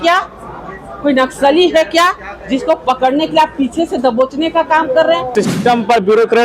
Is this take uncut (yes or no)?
no